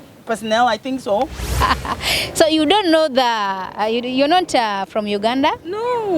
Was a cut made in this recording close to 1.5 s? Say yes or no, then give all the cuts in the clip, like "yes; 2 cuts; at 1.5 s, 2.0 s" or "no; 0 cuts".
yes; 1 cut; at 1.5 s